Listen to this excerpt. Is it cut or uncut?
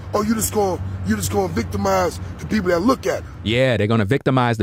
uncut